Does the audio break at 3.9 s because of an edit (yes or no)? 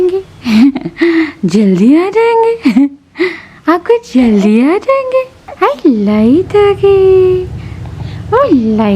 no